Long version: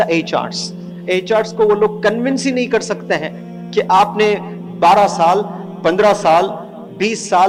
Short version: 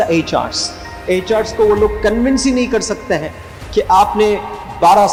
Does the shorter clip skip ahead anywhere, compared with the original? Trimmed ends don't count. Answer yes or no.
no